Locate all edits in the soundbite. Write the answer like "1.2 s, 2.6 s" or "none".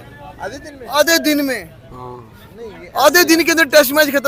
none